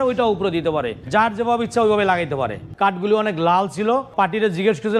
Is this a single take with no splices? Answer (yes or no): no